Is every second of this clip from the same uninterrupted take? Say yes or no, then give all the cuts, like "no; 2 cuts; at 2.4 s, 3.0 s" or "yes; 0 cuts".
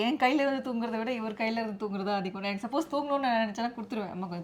yes; 0 cuts